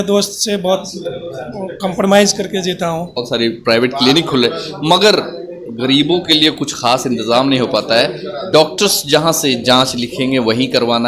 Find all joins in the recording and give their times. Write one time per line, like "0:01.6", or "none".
0:03.2